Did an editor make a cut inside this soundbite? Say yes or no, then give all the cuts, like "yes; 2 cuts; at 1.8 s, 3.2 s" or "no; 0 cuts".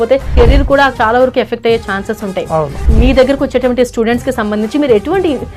no; 0 cuts